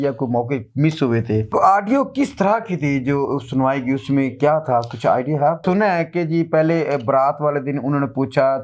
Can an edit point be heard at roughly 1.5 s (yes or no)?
yes